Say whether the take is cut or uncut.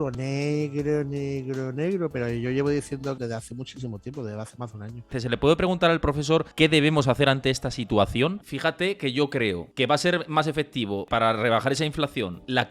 cut